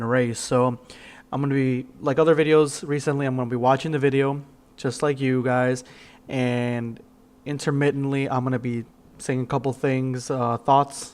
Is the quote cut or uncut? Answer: cut